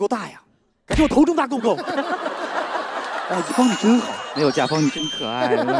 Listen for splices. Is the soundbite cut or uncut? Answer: uncut